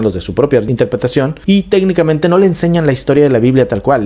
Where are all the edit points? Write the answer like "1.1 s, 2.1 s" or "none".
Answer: 1.1 s